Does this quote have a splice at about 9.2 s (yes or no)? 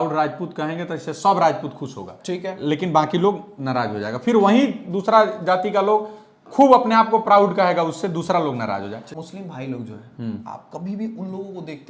yes